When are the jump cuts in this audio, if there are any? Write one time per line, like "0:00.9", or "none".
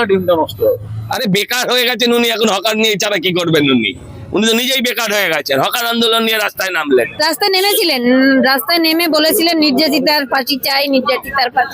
0:01.0
0:07.1